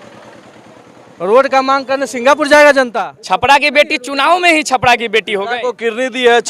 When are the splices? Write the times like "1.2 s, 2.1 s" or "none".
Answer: 2.9 s